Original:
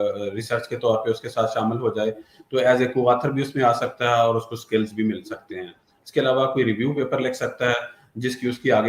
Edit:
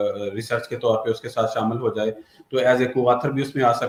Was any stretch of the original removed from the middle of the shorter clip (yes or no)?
no